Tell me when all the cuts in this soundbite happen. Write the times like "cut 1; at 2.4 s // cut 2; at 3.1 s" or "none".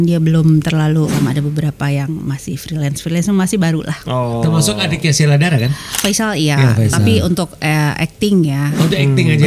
cut 1; at 1.1 s // cut 2; at 6.0 s